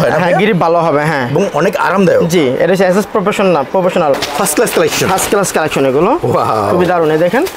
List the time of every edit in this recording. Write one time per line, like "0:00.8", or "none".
0:04.2